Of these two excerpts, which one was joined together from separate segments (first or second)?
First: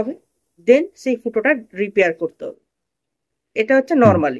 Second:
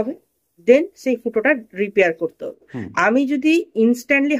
second